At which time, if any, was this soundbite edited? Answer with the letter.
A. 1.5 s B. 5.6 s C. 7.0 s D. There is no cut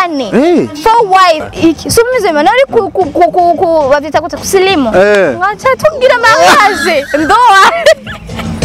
A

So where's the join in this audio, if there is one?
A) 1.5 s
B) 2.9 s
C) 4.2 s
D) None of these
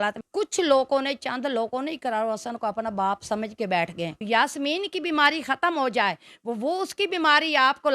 C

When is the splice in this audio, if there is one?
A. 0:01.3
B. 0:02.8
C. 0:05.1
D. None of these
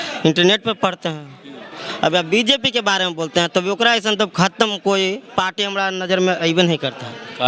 D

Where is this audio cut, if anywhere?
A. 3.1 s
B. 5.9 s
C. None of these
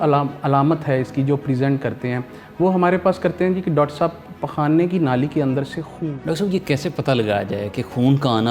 B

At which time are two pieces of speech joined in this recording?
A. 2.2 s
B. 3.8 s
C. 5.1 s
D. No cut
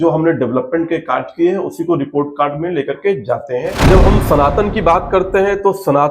B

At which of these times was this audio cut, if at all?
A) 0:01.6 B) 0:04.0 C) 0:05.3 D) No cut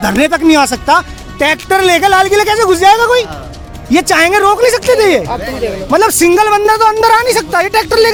D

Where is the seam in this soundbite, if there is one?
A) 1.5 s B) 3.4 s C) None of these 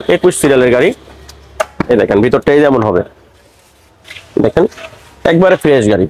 C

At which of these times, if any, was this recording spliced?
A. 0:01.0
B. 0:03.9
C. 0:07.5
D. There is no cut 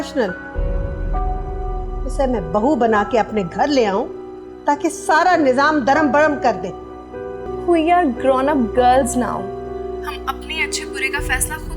C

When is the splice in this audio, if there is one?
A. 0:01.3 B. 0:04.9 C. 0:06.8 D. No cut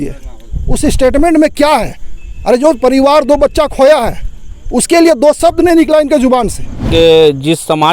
C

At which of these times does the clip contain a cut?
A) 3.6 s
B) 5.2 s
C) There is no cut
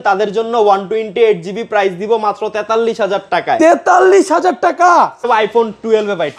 B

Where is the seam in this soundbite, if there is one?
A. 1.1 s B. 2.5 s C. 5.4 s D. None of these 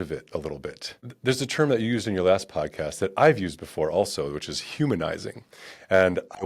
A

